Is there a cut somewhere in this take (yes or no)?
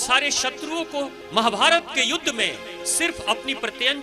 yes